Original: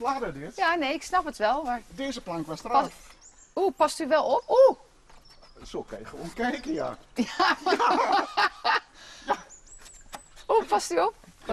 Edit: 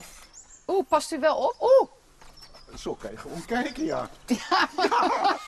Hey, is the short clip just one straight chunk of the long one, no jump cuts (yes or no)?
yes